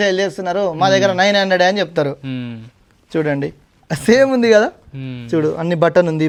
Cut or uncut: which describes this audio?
uncut